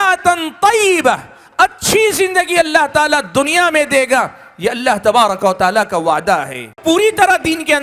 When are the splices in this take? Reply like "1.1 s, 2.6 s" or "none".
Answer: 6.8 s